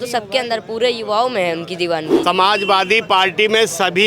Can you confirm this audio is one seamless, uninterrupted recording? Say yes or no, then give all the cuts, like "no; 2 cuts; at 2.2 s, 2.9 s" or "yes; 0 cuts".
no; 1 cut; at 2.1 s